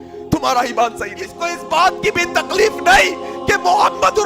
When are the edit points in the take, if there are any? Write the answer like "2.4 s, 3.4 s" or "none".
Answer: 1.5 s